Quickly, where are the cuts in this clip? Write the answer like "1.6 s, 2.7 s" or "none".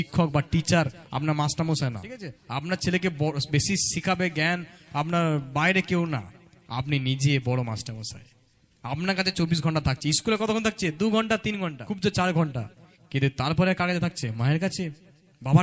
2.3 s, 11.8 s